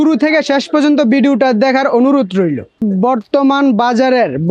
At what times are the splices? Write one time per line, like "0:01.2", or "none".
0:03.1